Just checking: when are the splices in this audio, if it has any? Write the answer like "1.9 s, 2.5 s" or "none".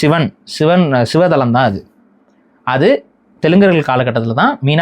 none